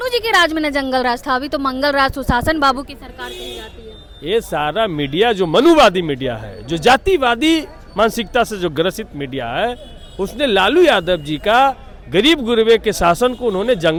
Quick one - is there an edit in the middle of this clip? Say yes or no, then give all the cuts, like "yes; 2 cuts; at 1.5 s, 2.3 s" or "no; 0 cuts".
no; 0 cuts